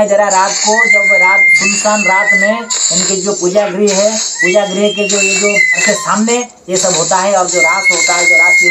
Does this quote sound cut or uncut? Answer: uncut